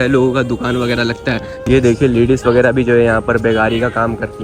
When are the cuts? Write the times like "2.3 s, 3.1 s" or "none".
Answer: 1.5 s